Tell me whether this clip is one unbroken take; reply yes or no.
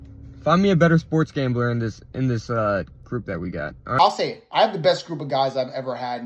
no